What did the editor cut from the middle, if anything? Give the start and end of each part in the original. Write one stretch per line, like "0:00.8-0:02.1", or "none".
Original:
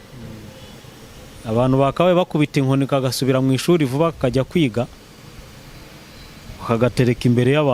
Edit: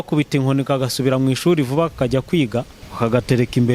0:05.0-0:06.5